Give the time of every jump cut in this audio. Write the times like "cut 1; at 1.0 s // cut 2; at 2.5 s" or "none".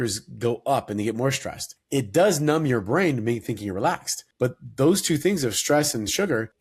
none